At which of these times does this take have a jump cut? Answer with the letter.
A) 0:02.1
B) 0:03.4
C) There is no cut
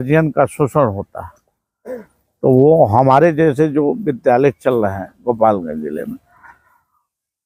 C